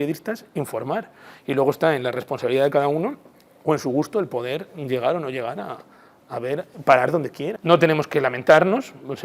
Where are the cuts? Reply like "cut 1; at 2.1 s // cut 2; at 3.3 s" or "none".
cut 1; at 7.5 s